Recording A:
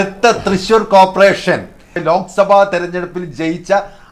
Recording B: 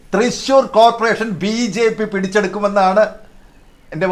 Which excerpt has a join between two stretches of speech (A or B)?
A